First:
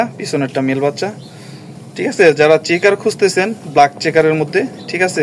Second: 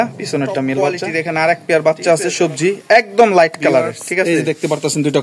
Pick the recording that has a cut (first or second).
second